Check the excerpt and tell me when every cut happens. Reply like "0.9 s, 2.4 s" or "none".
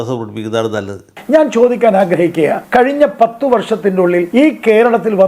1.2 s, 2.6 s, 4.3 s